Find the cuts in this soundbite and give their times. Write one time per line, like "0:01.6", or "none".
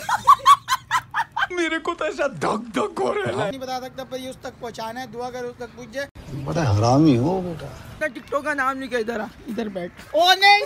0:03.6
0:08.0